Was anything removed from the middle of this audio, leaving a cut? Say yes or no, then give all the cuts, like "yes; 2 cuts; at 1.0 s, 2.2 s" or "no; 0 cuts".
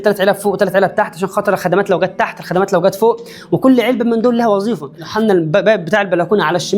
yes; 1 cut; at 5.0 s